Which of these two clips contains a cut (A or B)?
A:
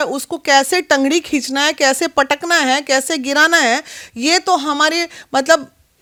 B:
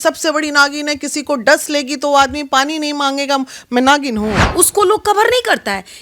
B